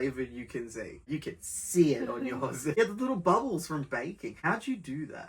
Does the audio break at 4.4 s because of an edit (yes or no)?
yes